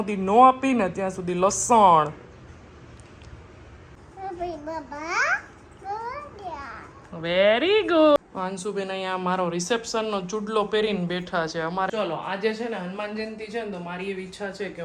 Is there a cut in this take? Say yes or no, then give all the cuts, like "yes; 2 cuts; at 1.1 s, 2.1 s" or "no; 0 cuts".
yes; 3 cuts; at 4.1 s, 8.2 s, 11.9 s